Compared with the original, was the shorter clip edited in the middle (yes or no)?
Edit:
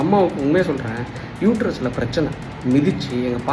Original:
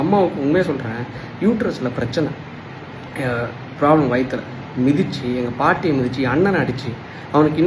yes